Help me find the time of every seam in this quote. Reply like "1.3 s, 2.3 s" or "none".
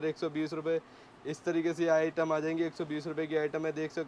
none